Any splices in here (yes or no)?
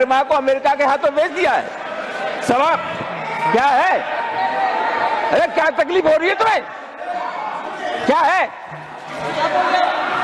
no